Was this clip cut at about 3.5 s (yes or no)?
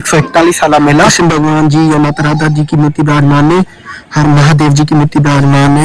no